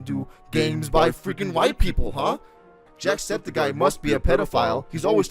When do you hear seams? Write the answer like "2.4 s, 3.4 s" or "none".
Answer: 2.9 s